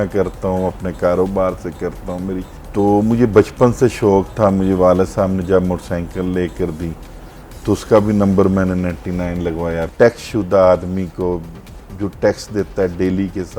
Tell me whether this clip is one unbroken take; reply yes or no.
no